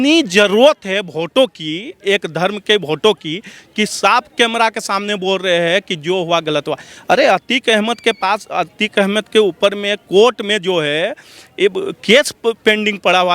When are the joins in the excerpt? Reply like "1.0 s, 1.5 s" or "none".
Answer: none